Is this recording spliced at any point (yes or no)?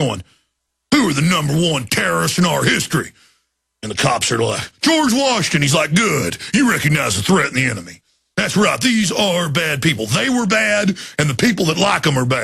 no